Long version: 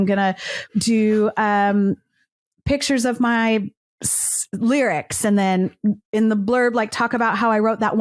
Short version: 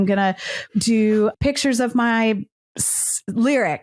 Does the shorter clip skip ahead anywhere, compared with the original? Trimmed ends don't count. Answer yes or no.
yes